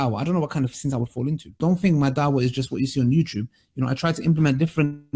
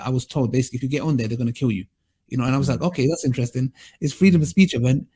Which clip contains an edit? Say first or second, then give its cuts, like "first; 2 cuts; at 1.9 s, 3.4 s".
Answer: first; 1 cut; at 1.6 s